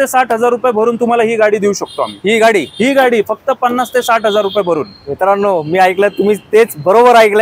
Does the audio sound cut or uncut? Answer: uncut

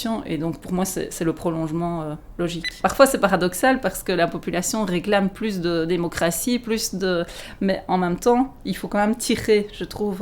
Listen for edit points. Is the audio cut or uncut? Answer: cut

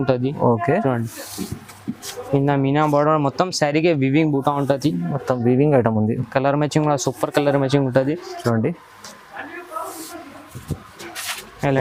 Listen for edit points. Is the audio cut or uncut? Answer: uncut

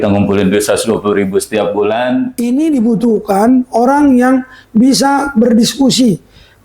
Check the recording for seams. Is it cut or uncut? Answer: cut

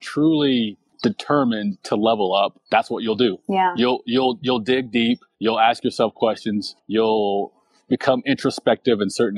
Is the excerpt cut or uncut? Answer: cut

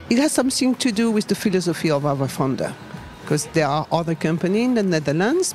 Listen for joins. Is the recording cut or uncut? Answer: uncut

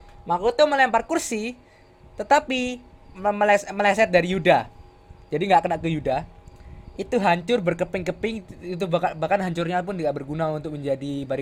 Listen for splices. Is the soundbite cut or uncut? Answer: uncut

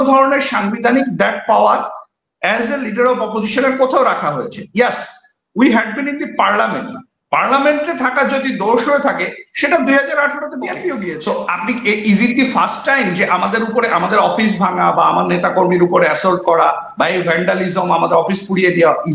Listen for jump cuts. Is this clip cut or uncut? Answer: cut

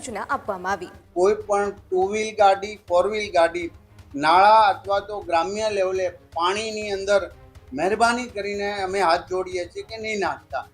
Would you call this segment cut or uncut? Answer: cut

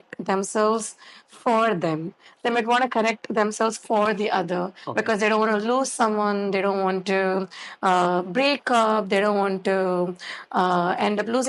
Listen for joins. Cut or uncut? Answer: uncut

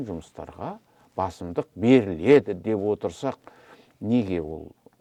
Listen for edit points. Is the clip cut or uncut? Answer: uncut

